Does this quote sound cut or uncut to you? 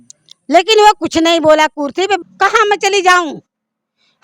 cut